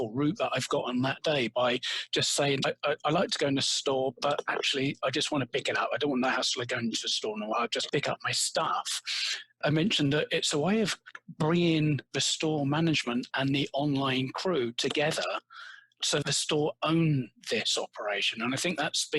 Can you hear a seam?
yes; 3 cuts; at 7.5 s, 9.6 s, 16.2 s

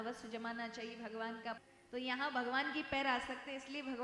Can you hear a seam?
yes; 1 cut; at 1.6 s

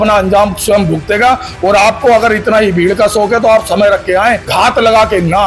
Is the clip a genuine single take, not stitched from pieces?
no; 1 cut; at 4.4 s

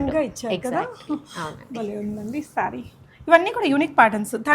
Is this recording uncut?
yes; 0 cuts

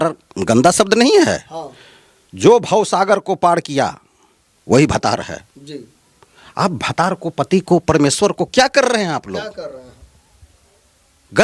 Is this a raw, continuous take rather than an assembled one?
yes; 0 cuts

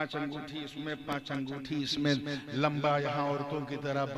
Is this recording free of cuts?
yes; 0 cuts

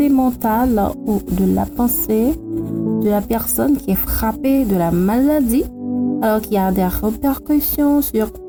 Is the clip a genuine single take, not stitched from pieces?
yes; 0 cuts

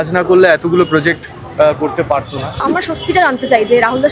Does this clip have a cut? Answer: yes; 1 cut; at 2.7 s

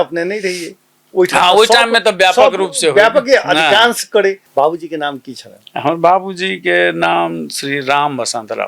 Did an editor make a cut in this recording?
yes; 1 cut; at 4.4 s

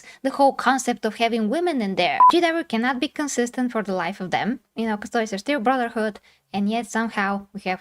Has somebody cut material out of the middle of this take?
yes; 1 cut; at 2.2 s

